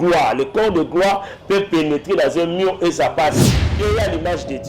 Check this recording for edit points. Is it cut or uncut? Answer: cut